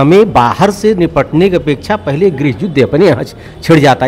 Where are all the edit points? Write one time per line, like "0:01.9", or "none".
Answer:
none

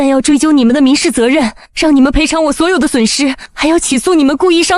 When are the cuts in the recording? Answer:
0:01.6
0:03.5

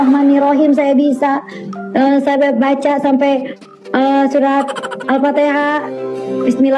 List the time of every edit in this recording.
none

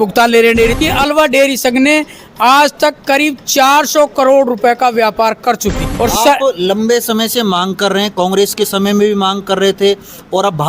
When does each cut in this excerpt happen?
0:00.8
0:05.9

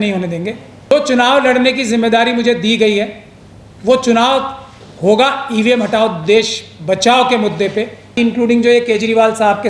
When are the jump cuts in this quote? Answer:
0:00.9
0:08.1

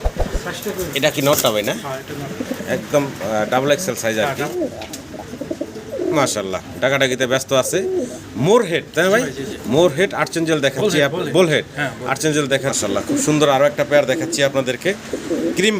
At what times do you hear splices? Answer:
0:04.5
0:12.8

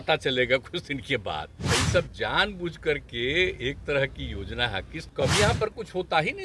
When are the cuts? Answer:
0:01.5
0:05.0

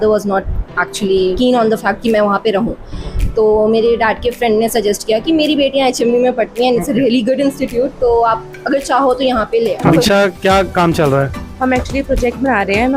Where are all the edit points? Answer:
0:01.4
0:09.9

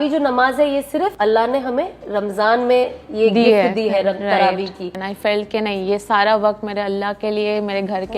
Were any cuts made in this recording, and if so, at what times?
0:01.1
0:04.8

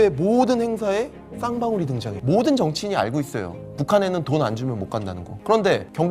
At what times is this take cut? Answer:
0:02.1

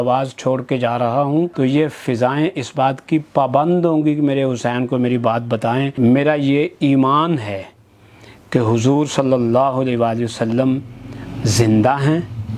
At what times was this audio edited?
0:01.5
0:05.9

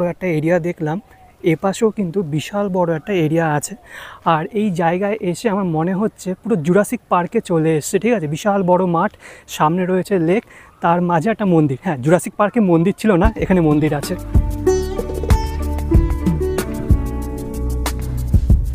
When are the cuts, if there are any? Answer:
none

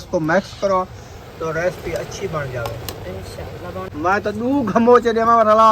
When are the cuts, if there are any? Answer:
0:03.9

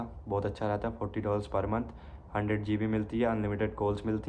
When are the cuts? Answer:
none

